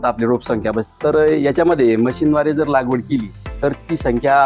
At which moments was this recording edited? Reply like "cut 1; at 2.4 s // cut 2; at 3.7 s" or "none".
cut 1; at 1.0 s